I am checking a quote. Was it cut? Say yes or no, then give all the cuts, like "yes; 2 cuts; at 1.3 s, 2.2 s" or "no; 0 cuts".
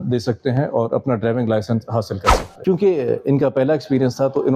yes; 1 cut; at 2.5 s